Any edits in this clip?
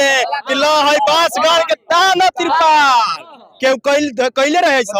no; 0 cuts

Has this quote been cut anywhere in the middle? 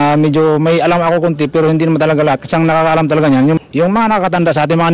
yes; 1 cut; at 3.6 s

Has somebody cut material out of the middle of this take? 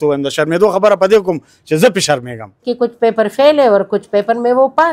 yes; 1 cut; at 2.7 s

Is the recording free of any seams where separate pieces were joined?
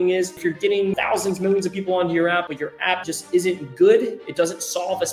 no; 2 cuts; at 0.9 s, 2.8 s

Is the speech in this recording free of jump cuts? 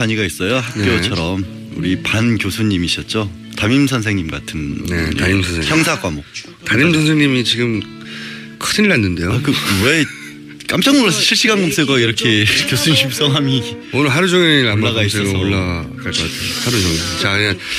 yes; 0 cuts

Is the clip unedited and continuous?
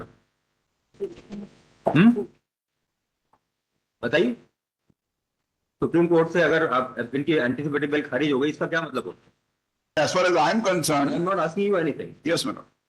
no; 2 cuts; at 0.9 s, 10.0 s

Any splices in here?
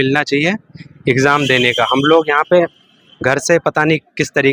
no; 0 cuts

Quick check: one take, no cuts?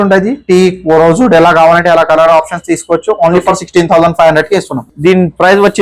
no; 1 cut; at 4.8 s

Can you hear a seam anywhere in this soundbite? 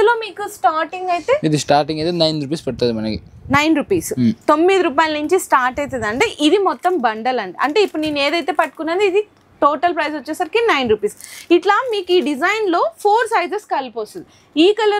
no; 0 cuts

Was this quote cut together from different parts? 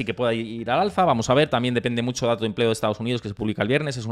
no; 0 cuts

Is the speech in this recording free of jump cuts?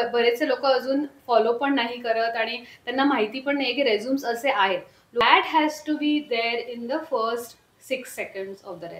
no; 1 cut; at 5.2 s

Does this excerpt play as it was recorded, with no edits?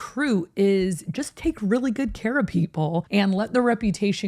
no; 1 cut; at 3.1 s

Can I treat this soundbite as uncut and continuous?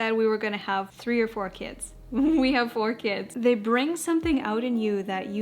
no; 2 cuts; at 0.9 s, 3.3 s

